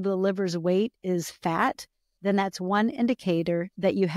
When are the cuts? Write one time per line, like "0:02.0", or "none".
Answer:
none